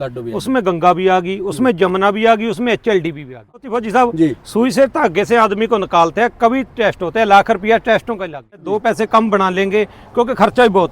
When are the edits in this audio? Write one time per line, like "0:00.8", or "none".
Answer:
0:03.7
0:08.7